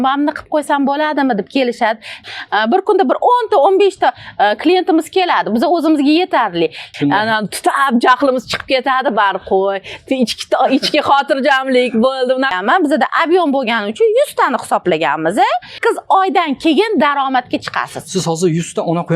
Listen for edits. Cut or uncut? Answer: cut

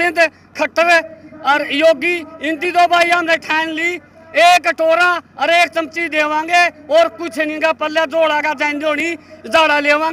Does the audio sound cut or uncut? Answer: uncut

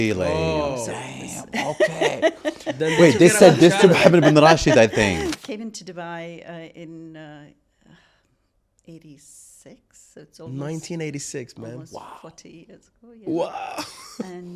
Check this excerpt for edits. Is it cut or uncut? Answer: cut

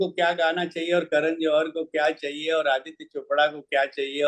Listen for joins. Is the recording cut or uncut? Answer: uncut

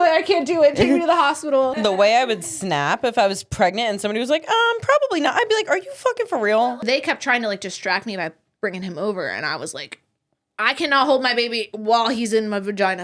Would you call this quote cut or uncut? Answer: cut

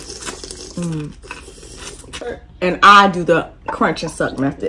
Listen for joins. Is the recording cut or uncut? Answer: cut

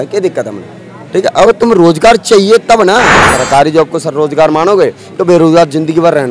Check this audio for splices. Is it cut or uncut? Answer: cut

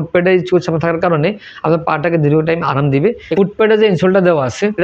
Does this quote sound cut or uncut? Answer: cut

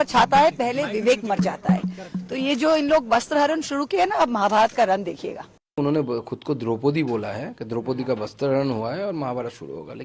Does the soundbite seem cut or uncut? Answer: cut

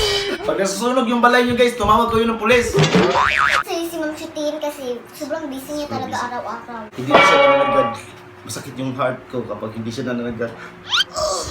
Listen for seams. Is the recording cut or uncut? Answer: cut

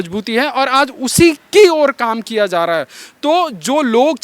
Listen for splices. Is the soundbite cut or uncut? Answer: uncut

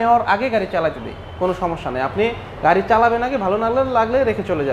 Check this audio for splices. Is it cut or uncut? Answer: uncut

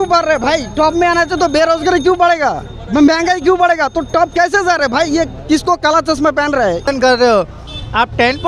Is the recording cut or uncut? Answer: cut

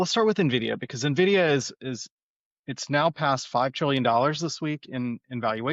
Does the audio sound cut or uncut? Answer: uncut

